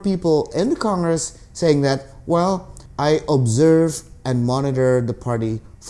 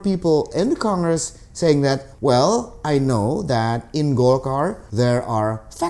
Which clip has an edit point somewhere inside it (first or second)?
second